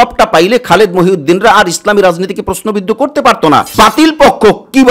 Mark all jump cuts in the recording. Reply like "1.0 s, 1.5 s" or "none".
3.7 s